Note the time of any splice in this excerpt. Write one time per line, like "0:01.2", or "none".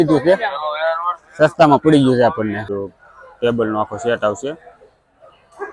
0:02.7

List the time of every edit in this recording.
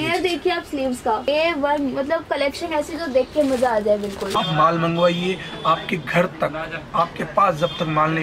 0:04.3

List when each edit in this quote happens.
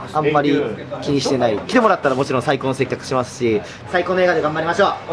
0:01.6
0:03.8

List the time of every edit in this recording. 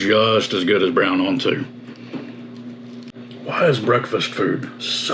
0:03.1

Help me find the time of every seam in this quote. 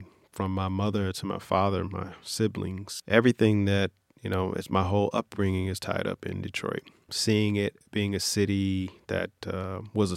0:02.9
0:07.1

